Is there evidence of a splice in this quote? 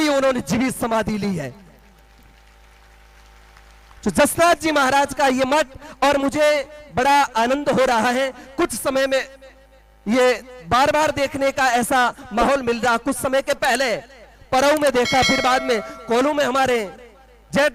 no; 0 cuts

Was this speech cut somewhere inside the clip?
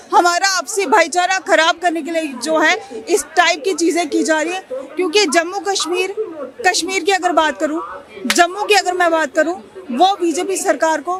no; 0 cuts

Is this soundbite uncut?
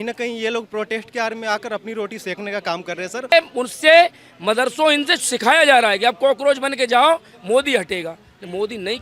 no; 1 cut; at 3.3 s

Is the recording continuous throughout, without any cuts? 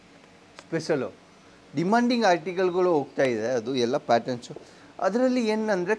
yes; 0 cuts

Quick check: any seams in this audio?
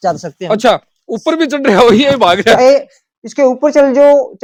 no; 0 cuts

